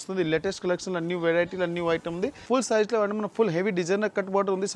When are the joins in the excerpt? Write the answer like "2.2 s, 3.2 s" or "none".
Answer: 2.4 s

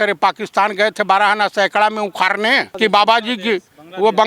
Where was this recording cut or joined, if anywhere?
2.7 s

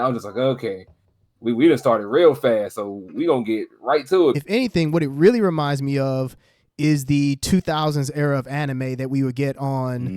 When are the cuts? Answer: 4.4 s

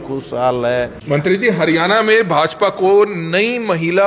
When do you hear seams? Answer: 1.0 s

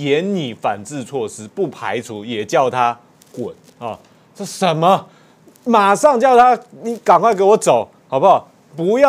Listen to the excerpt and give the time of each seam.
none

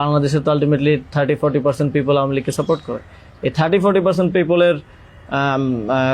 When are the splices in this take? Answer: none

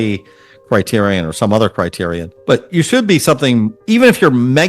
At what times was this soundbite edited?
2.3 s, 3.8 s

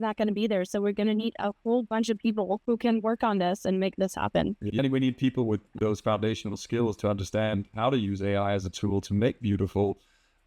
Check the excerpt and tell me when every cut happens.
2.6 s, 4.7 s, 5.7 s

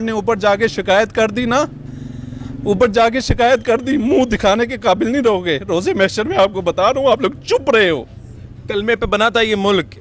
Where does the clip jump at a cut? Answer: none

